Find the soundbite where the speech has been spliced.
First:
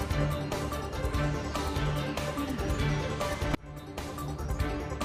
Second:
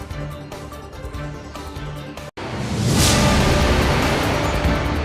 second; 1 cut; at 2.3 s

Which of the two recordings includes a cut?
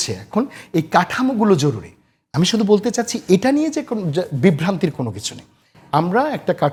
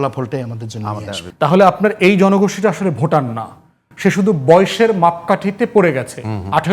second; 1 cut; at 1.2 s

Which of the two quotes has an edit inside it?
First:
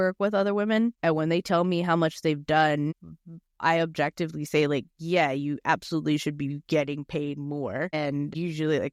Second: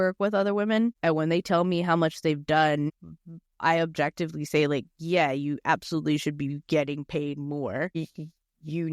second; 1 cut; at 7.9 s

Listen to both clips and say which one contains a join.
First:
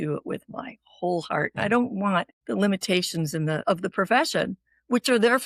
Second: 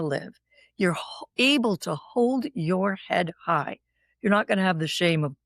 first; 2 cuts; at 2.4 s, 3.6 s

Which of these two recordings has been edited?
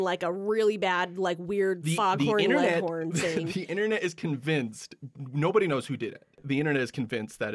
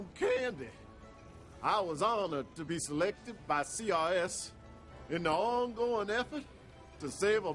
first; 1 cut; at 6.4 s

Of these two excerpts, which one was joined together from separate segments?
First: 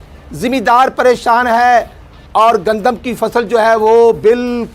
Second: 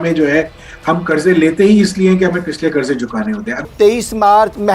second; 1 cut; at 3.5 s

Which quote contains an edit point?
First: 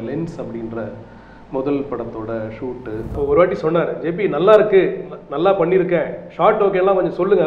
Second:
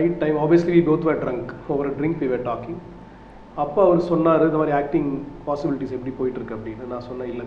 first; 1 cut; at 3.1 s

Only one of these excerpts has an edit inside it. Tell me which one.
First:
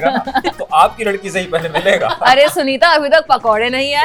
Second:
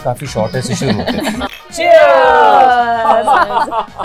second; 1 cut; at 1.6 s

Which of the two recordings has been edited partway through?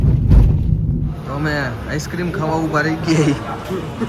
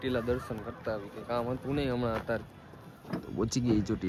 first; 1 cut; at 1.2 s

